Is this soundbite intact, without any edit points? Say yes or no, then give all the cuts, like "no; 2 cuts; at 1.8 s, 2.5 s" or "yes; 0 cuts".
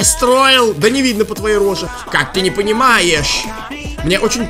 no; 1 cut; at 1.9 s